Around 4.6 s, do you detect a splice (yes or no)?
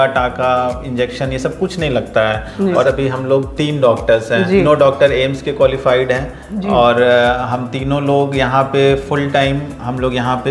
yes